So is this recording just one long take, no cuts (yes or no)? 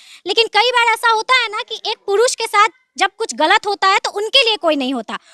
yes